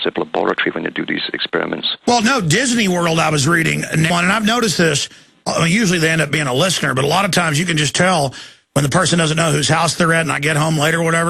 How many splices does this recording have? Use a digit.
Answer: 0